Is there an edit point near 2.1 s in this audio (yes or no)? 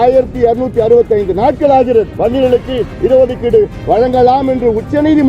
yes